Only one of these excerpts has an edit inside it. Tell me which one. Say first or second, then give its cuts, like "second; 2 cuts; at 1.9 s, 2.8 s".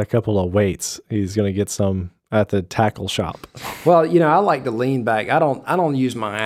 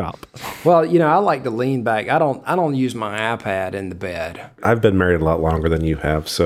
second; 1 cut; at 4.5 s